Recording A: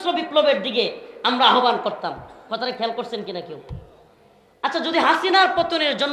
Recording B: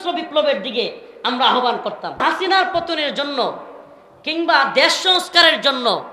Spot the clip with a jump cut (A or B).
B